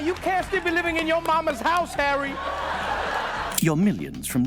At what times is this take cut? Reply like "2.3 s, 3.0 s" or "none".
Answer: 3.5 s